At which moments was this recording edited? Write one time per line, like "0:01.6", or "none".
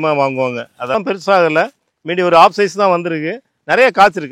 0:00.9